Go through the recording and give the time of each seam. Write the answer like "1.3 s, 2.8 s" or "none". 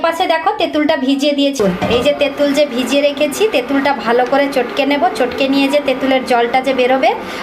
1.6 s